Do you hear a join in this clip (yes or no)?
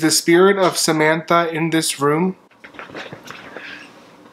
yes